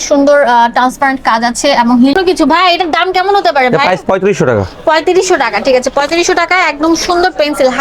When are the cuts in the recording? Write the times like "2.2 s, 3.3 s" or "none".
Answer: 2.2 s